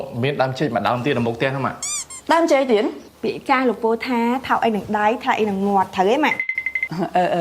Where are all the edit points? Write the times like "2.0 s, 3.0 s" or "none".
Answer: 3.0 s